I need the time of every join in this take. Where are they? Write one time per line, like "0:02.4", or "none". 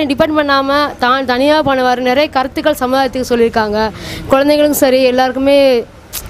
none